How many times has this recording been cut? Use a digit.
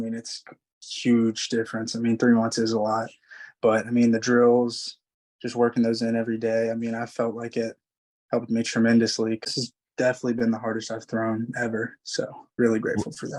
2